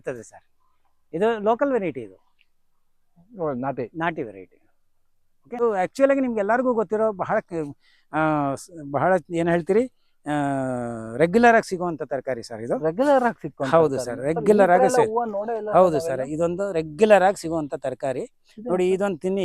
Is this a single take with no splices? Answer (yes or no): no